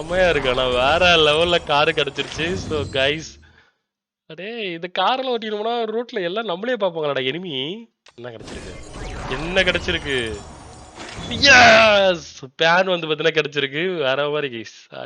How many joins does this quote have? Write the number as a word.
one